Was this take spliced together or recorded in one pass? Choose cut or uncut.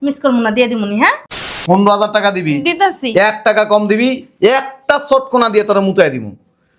cut